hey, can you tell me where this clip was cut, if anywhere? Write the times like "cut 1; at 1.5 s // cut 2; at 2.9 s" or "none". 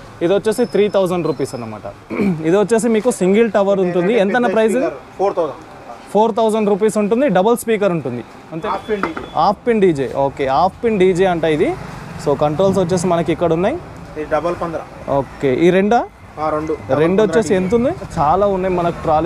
cut 1; at 2.2 s // cut 2; at 8.6 s // cut 3; at 18.1 s